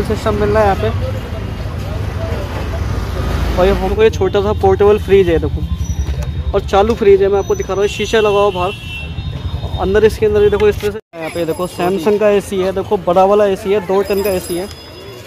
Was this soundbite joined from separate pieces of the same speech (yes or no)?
yes